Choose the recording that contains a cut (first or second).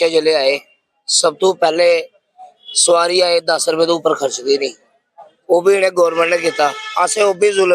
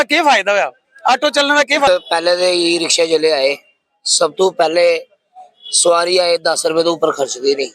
second